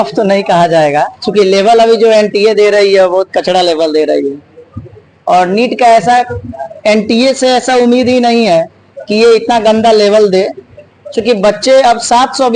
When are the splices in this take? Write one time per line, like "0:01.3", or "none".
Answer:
none